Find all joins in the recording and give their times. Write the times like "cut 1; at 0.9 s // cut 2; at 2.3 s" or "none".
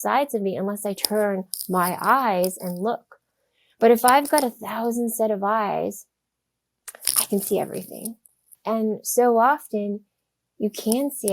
cut 1; at 8.2 s